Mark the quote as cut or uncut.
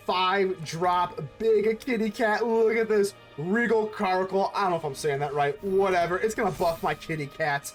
uncut